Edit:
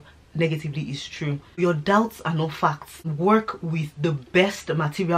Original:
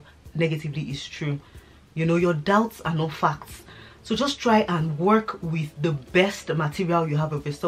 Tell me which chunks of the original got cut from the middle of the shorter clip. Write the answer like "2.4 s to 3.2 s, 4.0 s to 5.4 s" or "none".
1.6 s to 2.2 s, 3.7 s to 4.9 s